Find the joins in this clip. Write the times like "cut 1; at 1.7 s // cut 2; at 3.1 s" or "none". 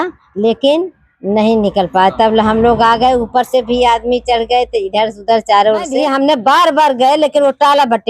cut 1; at 5.9 s